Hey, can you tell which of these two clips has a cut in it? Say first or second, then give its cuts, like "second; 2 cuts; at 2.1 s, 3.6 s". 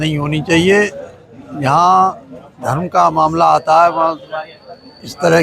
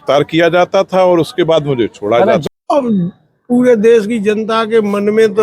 second; 1 cut; at 2.4 s